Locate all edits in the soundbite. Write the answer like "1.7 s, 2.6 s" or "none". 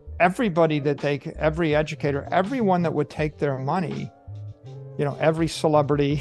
none